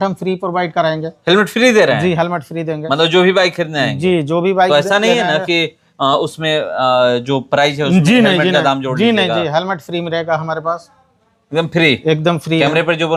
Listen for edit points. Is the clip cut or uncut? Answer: uncut